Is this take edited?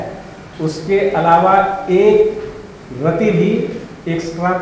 no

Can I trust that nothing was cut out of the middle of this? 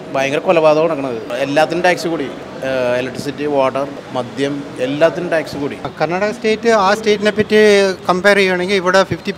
no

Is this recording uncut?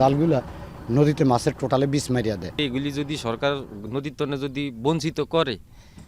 yes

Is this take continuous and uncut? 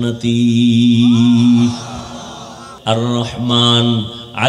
no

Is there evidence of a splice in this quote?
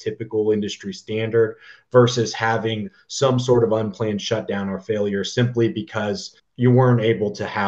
yes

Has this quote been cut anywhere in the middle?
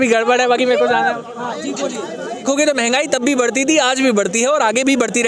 yes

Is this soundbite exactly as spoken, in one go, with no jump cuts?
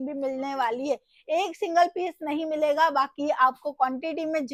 yes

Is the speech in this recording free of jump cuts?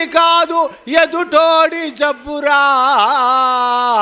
yes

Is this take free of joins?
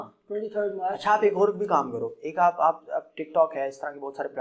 yes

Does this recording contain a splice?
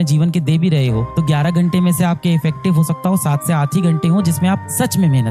no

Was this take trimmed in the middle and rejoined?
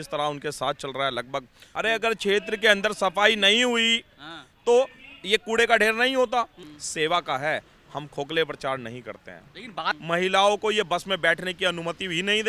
yes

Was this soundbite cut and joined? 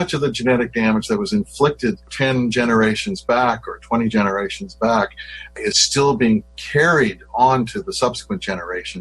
yes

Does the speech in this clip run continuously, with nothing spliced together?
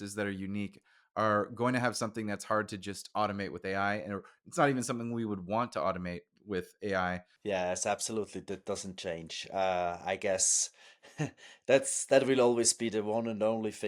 no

